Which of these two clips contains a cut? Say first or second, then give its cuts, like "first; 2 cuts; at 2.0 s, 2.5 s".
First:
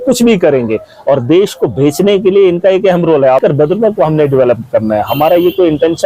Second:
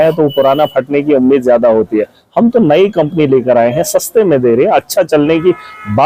first; 1 cut; at 3.4 s